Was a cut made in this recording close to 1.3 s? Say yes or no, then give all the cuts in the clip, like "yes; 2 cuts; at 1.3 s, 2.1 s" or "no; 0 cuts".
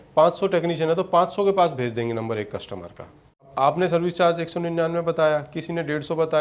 no; 1 cut; at 3.5 s